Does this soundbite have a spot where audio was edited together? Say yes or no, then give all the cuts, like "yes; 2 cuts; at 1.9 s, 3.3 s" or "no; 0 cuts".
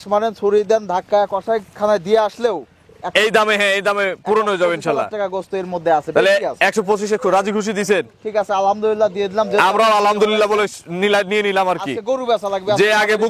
no; 0 cuts